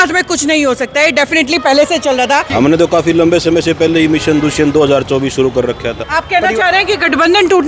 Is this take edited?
yes; 2 cuts; at 2.5 s, 5.9 s

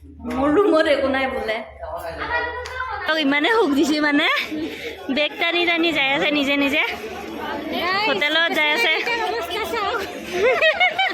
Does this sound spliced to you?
yes; 1 cut; at 3.1 s

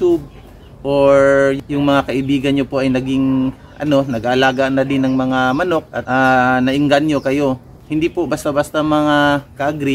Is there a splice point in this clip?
no; 0 cuts

